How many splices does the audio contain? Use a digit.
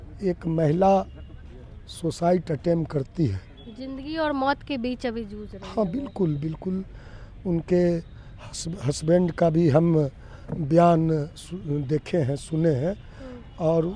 0